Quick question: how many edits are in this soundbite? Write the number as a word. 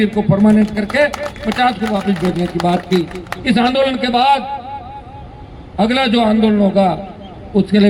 zero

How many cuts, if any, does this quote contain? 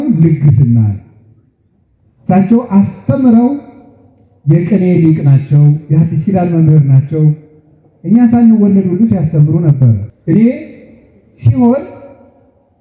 one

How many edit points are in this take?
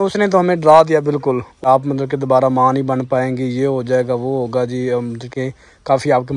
one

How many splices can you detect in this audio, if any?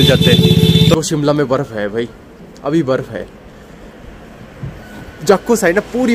one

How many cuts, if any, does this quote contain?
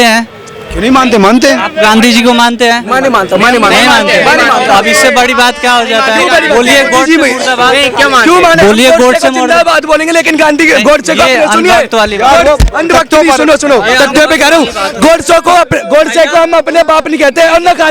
zero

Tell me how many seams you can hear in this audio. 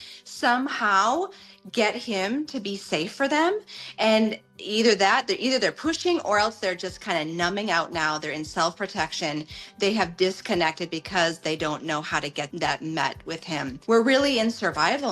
two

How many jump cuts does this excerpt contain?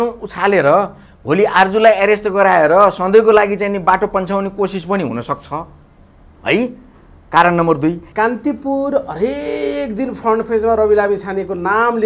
one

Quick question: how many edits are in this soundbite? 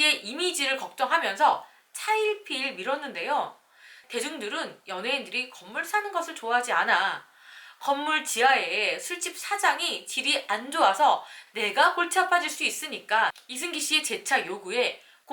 one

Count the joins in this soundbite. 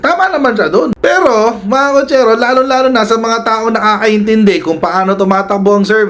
one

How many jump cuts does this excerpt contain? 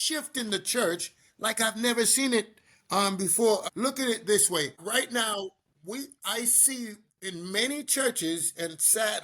two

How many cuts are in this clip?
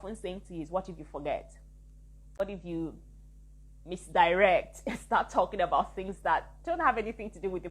one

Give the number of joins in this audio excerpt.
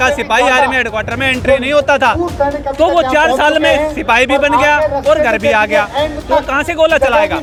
zero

